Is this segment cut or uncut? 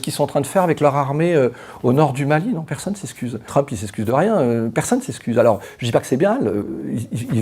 uncut